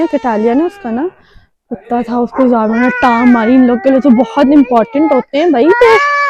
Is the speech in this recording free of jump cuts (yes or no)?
yes